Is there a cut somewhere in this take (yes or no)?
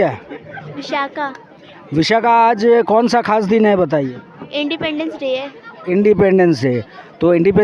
no